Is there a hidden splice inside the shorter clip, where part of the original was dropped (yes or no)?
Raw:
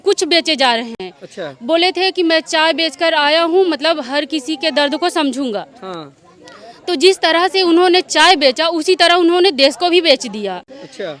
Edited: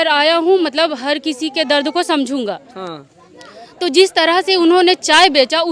no